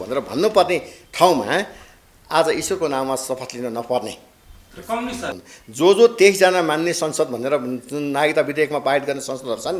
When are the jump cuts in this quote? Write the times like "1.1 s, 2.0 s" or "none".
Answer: 5.4 s